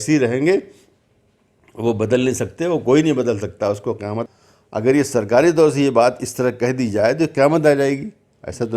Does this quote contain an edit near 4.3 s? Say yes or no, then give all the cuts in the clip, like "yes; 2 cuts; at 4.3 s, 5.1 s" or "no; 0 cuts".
yes; 1 cut; at 4.3 s